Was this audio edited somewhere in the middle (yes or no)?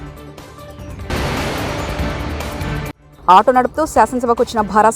no